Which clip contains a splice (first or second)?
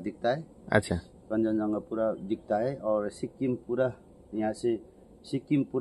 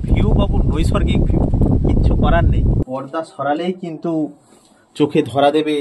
second